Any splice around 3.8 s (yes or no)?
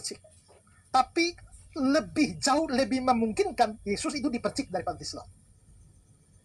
no